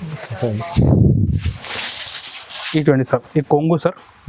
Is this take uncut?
yes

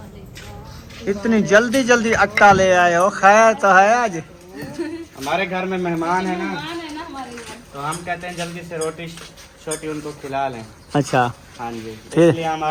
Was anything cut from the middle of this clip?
no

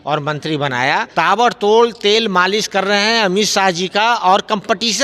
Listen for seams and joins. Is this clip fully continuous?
no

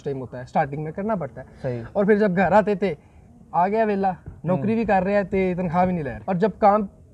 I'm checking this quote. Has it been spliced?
yes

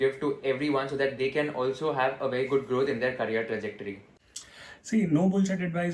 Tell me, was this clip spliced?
no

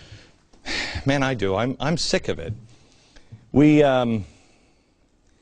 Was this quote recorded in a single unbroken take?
no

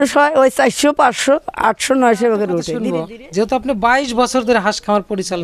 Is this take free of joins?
no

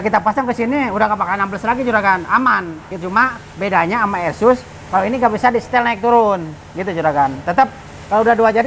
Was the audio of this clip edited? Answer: no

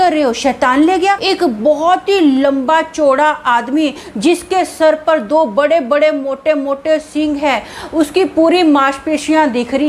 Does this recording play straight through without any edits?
no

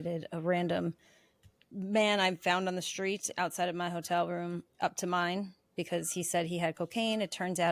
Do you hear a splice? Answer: no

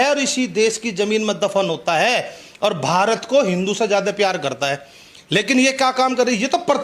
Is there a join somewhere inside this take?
no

